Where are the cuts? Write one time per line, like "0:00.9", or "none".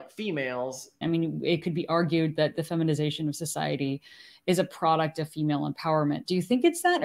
0:01.0